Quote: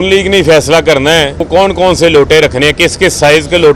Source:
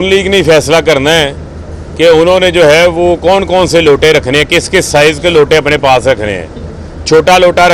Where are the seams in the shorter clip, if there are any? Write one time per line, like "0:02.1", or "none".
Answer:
0:01.4